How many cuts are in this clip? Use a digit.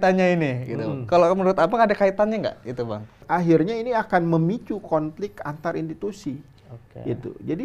1